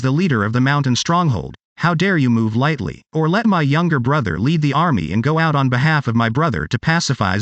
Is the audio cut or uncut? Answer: uncut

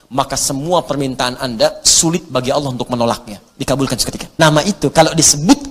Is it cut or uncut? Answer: cut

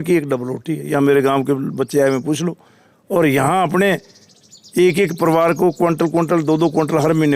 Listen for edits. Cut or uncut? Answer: uncut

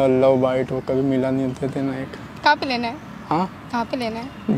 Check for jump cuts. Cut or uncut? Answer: uncut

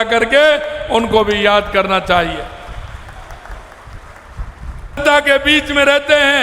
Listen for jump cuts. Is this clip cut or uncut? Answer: cut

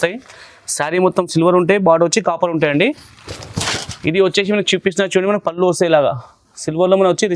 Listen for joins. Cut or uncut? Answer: uncut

